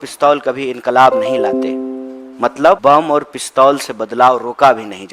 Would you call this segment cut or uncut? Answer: cut